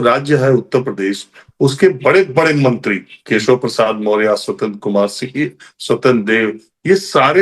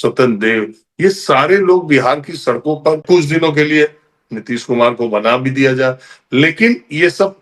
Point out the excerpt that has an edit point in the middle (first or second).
second